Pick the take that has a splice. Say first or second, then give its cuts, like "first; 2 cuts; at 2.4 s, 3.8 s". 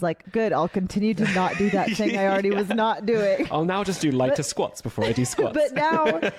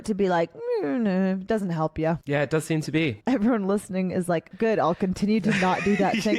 second; 1 cut; at 3.2 s